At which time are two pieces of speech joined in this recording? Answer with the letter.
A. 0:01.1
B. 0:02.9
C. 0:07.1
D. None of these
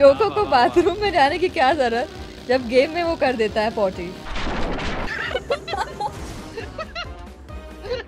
D